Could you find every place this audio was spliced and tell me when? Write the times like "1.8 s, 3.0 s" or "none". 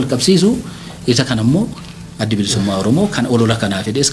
none